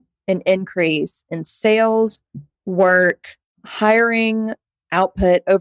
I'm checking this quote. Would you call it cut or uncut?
uncut